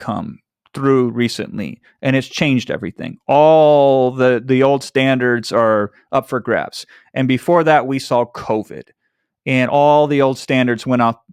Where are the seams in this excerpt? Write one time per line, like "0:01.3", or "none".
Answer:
none